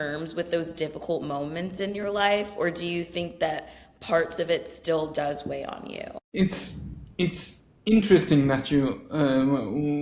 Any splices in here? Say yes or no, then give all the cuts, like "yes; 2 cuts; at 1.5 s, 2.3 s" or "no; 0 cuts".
no; 0 cuts